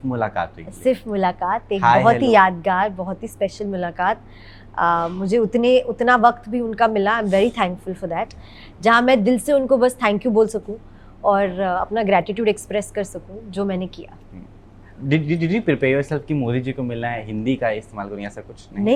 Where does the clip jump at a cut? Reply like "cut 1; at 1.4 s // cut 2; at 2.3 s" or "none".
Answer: none